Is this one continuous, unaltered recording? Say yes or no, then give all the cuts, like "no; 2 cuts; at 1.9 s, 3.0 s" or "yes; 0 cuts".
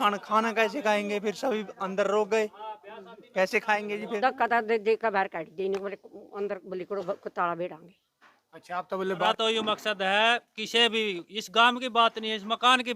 no; 2 cuts; at 4.2 s, 9.3 s